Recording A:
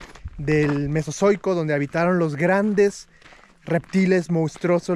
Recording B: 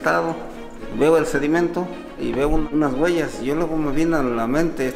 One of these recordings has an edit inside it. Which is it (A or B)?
B